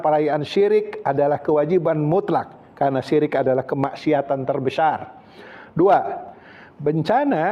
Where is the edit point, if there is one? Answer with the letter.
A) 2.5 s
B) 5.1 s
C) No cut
B